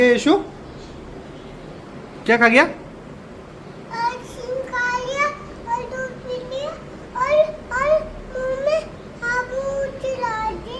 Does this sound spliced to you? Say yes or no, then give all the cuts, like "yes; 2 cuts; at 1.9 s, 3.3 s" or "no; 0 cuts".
no; 0 cuts